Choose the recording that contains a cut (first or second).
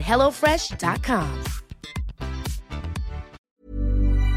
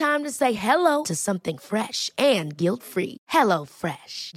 first